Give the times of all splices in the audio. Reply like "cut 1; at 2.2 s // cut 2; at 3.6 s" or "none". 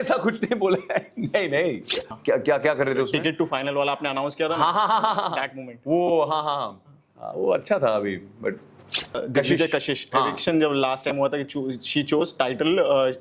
cut 1; at 2.1 s // cut 2; at 9.2 s